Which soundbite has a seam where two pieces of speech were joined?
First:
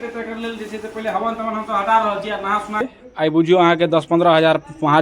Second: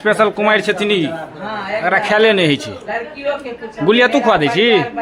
first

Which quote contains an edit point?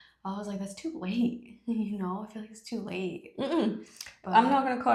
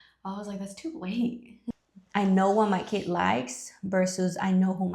second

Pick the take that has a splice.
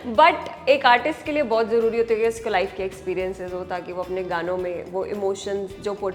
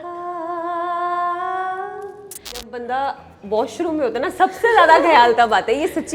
second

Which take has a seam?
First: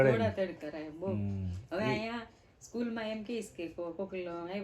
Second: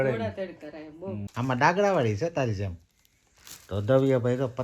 second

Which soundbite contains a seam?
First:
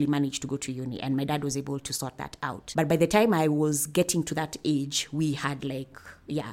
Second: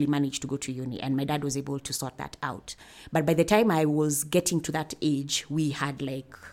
first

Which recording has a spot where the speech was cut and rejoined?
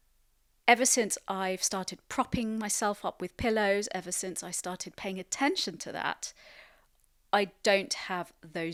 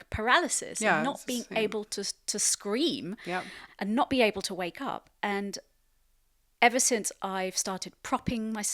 second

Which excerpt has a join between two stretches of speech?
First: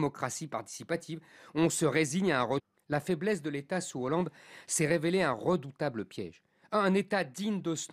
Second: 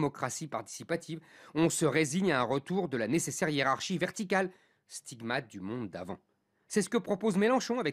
second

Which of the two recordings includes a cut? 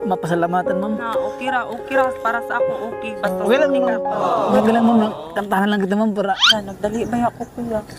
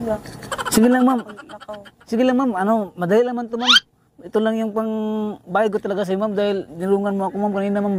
first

